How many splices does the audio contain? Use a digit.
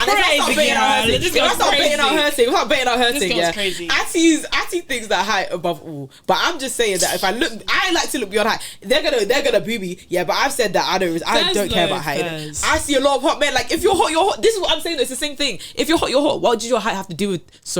0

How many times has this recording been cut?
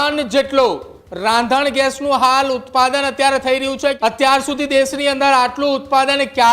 1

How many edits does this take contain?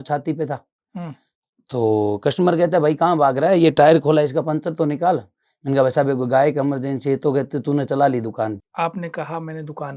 1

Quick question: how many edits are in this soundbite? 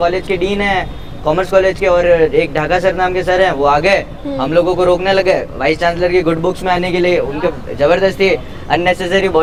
0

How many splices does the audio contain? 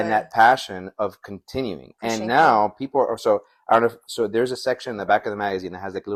0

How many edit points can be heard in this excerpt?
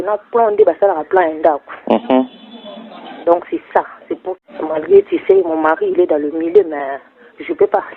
1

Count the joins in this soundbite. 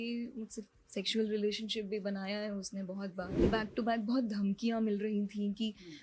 1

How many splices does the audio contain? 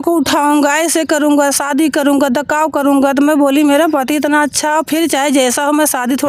0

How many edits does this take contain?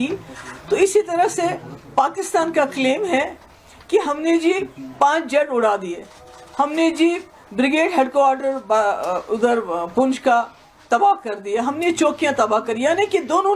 0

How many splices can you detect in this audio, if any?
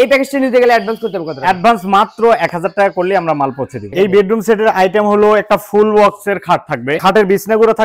2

